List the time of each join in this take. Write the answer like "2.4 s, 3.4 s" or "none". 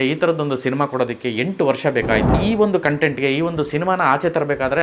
2.4 s